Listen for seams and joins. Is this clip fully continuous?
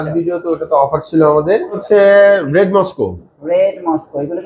no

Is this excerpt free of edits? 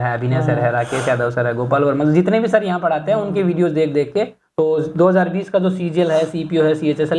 no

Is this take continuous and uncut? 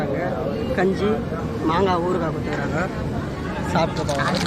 yes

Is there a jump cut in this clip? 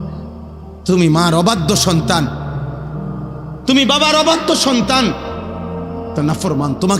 yes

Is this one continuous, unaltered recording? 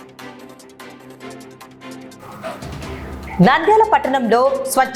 no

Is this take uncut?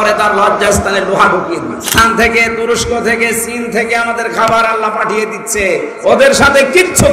no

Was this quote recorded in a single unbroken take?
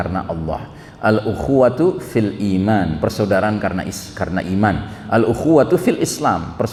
yes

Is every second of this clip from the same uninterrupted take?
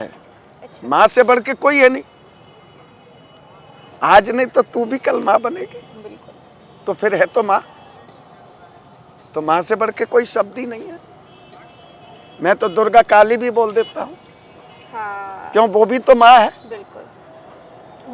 yes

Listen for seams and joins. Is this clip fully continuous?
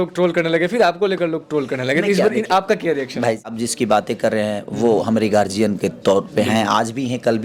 no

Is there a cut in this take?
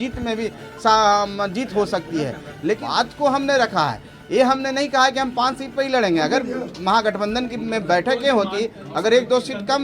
yes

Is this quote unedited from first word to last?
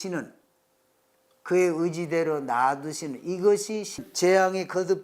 no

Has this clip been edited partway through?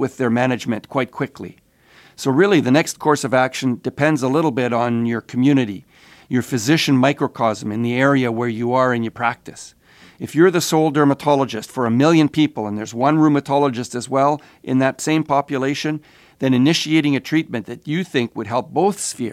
no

